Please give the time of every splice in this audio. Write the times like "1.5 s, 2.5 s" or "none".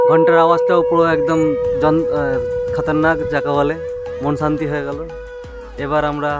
none